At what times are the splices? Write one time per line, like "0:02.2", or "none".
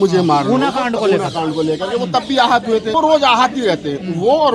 0:02.9